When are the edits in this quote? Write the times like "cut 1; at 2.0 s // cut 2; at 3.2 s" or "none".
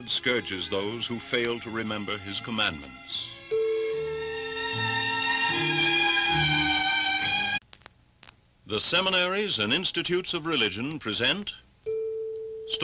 none